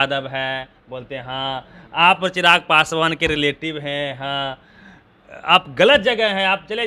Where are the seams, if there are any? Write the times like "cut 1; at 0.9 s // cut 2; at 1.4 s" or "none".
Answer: none